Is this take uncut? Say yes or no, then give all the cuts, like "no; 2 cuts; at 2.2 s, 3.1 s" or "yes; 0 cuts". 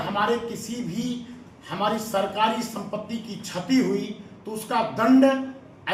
yes; 0 cuts